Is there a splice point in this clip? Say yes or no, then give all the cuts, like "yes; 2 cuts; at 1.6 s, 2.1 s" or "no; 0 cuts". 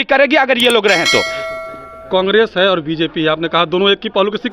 no; 0 cuts